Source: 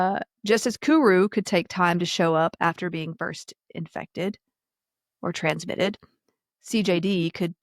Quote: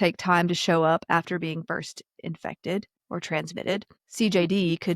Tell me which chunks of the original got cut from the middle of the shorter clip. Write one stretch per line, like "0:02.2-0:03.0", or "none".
0:04.5-0:05.1
0:06.1-0:06.5